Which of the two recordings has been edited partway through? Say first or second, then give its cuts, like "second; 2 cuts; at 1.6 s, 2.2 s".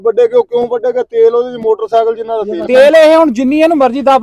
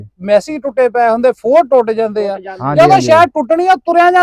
first; 1 cut; at 2.5 s